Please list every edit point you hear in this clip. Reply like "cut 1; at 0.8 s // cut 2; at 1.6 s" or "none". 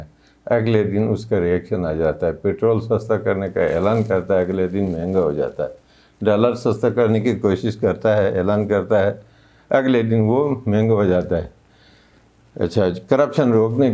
none